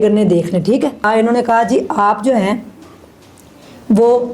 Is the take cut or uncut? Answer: cut